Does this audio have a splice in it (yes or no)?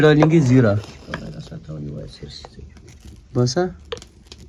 no